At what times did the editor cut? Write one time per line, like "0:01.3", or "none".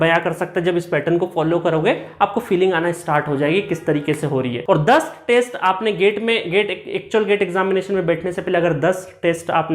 0:04.6